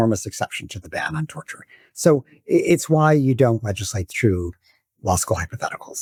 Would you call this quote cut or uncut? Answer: uncut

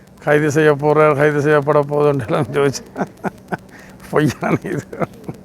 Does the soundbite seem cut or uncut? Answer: uncut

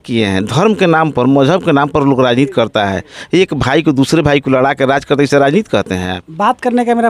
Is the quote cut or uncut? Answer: cut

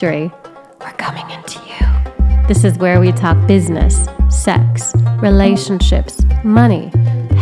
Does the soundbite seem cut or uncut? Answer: uncut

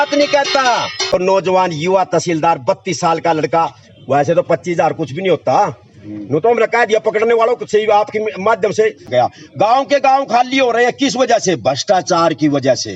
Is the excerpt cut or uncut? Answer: cut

